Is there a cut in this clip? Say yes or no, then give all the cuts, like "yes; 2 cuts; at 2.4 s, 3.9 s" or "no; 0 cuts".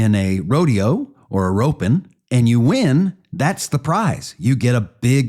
yes; 1 cut; at 2.2 s